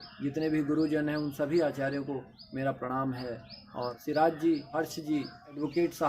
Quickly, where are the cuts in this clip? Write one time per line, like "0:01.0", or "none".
0:04.0
0:05.1

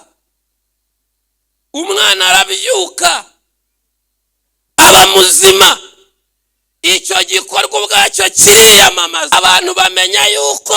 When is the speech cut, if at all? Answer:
0:09.3

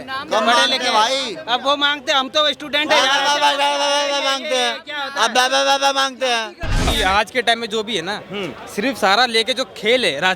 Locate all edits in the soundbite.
0:06.8

